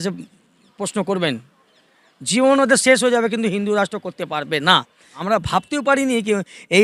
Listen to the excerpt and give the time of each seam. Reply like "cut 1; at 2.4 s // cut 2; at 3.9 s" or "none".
cut 1; at 5.2 s